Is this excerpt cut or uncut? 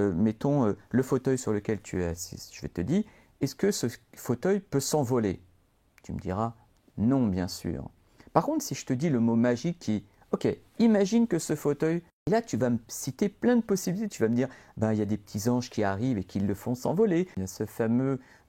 cut